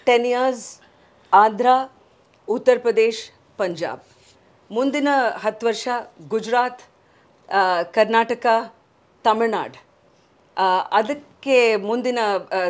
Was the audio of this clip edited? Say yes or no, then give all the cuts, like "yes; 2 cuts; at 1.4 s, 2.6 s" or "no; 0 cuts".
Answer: no; 0 cuts